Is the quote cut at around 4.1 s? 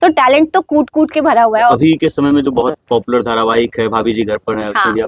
no; 1 cut; at 1.7 s

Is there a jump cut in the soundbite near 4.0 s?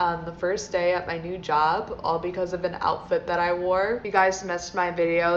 yes; 1 cut; at 4.0 s

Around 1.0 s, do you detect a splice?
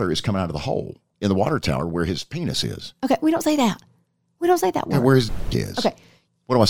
yes; 1 cut; at 1.0 s

